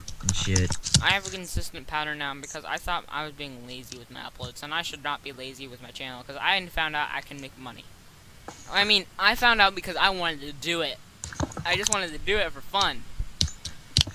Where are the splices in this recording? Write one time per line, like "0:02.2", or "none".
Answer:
0:04.9